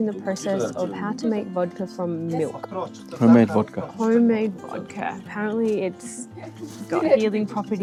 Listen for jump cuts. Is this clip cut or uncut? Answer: uncut